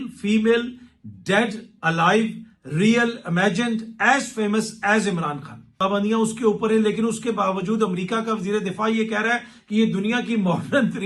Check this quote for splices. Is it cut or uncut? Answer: cut